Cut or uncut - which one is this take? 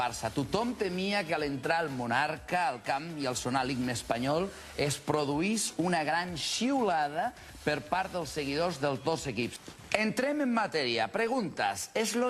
uncut